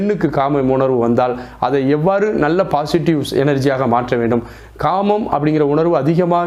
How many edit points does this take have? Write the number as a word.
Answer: zero